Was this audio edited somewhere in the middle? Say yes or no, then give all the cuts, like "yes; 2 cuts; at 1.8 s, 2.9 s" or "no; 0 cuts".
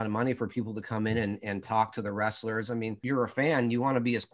yes; 1 cut; at 2.9 s